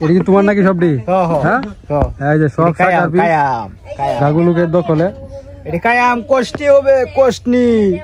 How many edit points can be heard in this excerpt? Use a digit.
0